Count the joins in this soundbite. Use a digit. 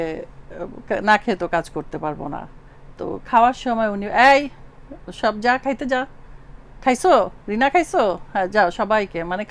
0